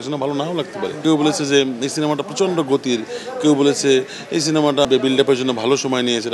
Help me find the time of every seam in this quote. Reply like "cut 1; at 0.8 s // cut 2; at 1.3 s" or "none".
cut 1; at 1.0 s // cut 2; at 4.9 s